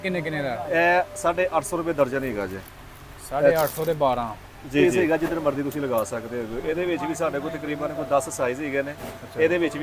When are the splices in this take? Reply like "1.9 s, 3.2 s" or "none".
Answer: 4.8 s